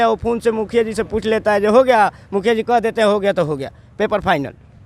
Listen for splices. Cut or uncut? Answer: uncut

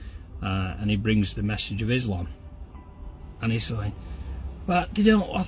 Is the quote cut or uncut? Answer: uncut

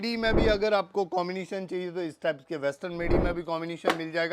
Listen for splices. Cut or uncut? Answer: uncut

